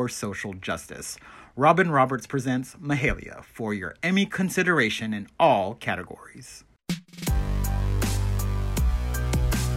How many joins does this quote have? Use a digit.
1